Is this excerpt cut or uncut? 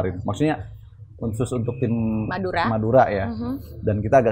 uncut